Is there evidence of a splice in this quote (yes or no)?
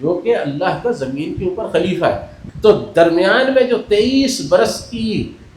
yes